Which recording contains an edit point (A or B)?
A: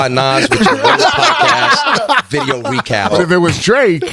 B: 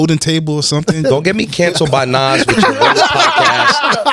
A